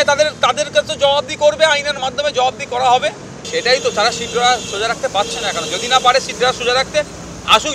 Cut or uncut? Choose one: cut